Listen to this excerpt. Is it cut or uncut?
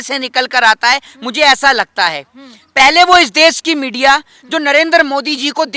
uncut